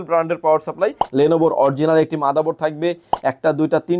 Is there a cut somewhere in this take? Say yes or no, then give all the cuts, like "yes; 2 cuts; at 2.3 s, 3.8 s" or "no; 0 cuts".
yes; 2 cuts; at 1.0 s, 3.1 s